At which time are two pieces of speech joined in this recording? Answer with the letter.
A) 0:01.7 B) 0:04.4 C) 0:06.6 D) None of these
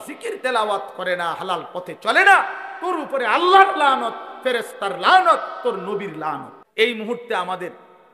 C